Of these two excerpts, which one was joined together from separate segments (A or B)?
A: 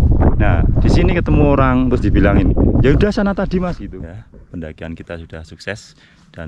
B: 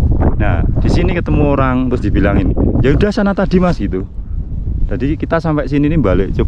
A